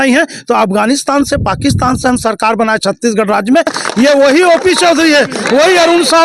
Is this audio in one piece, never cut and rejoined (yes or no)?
no